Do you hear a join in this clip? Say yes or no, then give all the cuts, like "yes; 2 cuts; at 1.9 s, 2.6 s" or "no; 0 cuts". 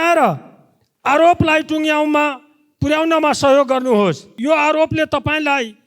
yes; 1 cut; at 4.3 s